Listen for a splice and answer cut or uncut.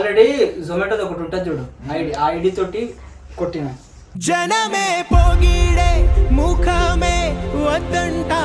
uncut